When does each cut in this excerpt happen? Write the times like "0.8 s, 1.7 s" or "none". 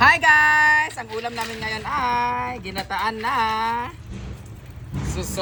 none